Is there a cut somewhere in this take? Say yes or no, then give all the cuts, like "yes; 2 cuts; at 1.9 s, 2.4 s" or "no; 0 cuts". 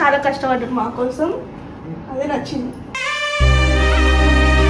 no; 0 cuts